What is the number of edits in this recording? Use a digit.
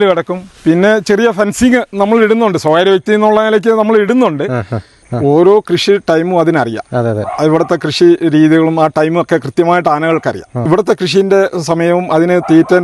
2